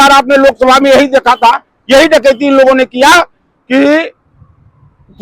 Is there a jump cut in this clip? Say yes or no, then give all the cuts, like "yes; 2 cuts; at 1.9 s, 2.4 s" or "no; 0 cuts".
no; 0 cuts